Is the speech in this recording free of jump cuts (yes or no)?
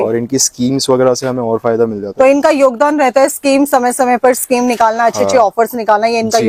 yes